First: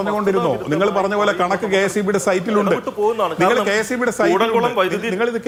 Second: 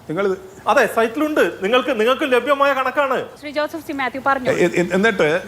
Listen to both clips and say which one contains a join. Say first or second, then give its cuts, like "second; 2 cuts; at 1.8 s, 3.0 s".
second; 1 cut; at 3.4 s